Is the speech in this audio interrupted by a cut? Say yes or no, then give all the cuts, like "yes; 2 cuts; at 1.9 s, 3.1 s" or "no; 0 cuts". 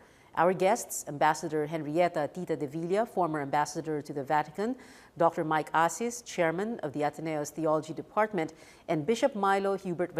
yes; 1 cut; at 5.8 s